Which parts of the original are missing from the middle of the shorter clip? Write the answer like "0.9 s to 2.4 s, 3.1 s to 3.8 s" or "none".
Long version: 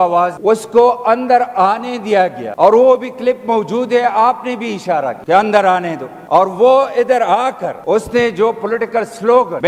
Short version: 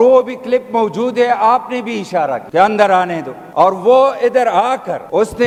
none

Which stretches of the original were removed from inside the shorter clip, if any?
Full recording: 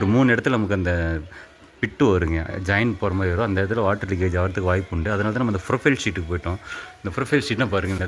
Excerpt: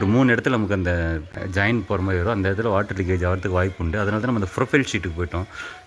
1.4 s to 2.5 s

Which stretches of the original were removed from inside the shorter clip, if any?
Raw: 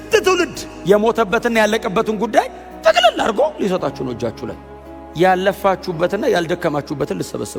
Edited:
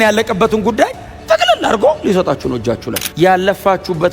4.5 s to 5.0 s

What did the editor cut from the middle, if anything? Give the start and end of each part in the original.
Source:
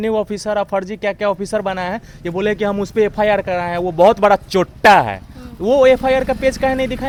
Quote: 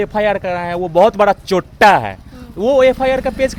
none

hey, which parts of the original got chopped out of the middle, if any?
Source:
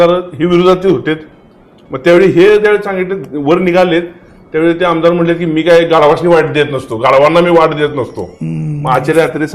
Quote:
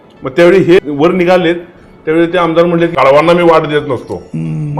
2.5 s to 3.3 s, 5.4 s to 7.0 s

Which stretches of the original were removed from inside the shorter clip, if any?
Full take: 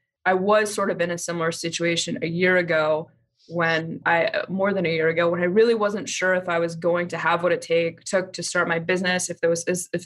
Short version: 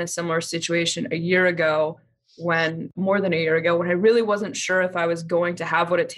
4.0 s to 4.4 s

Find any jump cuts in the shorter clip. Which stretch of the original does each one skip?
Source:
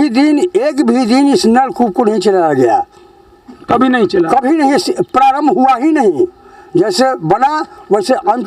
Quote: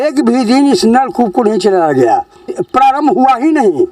3.2 s to 5.0 s

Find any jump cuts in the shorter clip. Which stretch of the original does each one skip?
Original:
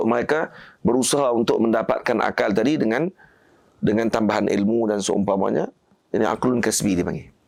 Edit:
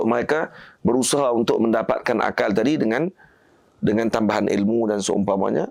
none

